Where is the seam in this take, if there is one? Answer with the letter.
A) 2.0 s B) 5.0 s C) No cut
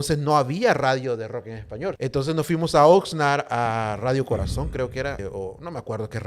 A